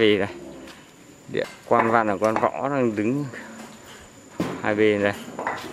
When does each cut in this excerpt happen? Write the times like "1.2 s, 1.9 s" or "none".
1.5 s